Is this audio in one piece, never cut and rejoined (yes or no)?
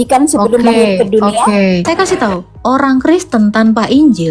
no